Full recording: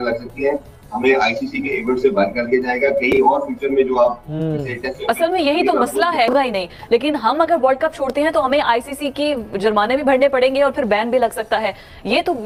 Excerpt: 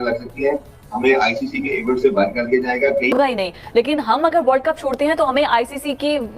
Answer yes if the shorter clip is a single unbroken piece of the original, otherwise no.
no